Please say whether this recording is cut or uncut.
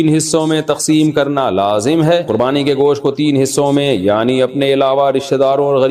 cut